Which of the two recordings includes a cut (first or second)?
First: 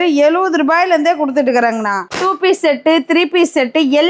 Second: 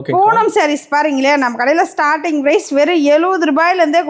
first